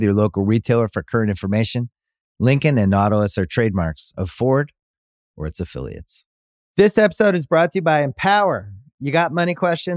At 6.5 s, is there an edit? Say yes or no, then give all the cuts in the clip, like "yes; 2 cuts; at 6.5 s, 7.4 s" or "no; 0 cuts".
yes; 1 cut; at 6.5 s